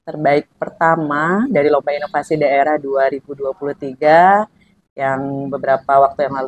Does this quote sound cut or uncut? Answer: uncut